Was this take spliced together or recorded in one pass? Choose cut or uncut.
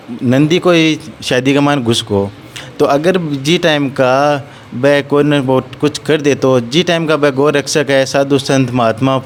uncut